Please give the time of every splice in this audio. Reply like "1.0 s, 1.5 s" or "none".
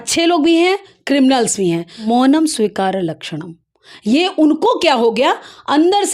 2.0 s